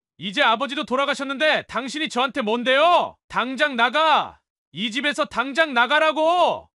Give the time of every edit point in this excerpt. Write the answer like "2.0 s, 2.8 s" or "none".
3.2 s